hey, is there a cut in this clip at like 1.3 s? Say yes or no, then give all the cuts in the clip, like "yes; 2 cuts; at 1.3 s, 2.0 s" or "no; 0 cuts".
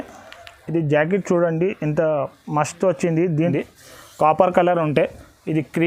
no; 1 cut; at 3.5 s